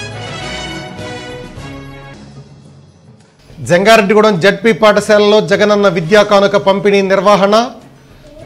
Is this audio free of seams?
yes; 0 cuts

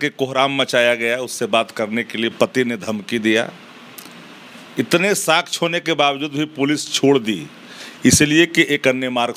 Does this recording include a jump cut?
no; 0 cuts

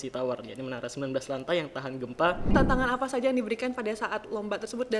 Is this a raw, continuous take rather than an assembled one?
no; 1 cut; at 2.5 s

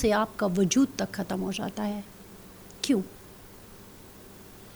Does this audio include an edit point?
no; 0 cuts

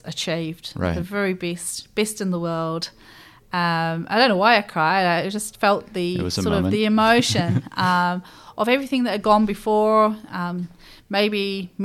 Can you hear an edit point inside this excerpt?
no; 0 cuts

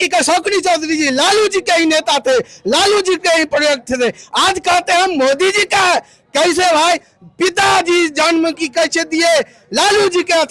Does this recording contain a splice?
no; 0 cuts

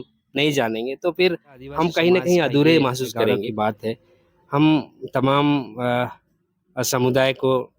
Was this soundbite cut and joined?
yes; 1 cut; at 3.5 s

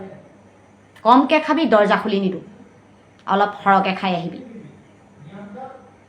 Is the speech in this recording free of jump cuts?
yes; 0 cuts

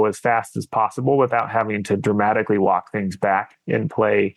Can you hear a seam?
no; 0 cuts

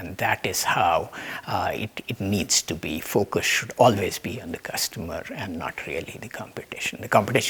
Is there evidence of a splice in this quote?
no; 0 cuts

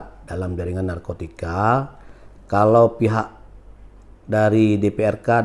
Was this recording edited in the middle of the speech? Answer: no; 0 cuts

